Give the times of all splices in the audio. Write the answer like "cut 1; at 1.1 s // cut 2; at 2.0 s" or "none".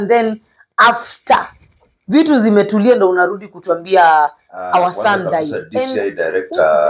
cut 1; at 5.6 s